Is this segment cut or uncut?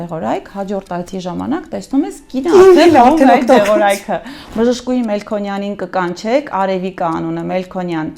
cut